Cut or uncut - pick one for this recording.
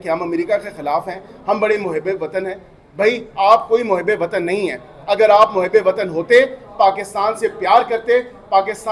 uncut